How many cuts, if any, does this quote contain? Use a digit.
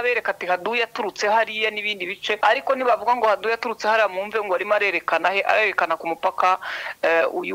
1